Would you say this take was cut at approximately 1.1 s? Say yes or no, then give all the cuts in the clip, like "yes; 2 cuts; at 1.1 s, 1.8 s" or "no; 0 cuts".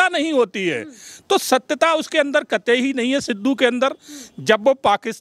no; 0 cuts